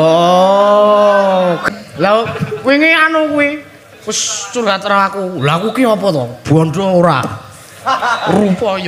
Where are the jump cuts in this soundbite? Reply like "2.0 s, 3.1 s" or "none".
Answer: 1.6 s